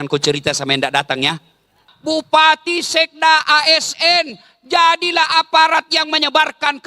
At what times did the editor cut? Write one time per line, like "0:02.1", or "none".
0:01.9